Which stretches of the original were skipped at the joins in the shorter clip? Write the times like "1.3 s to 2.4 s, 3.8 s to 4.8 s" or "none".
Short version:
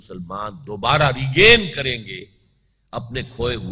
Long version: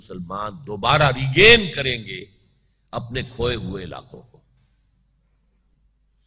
none